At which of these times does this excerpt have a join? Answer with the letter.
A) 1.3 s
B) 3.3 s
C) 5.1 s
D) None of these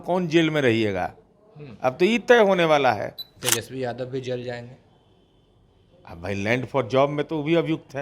B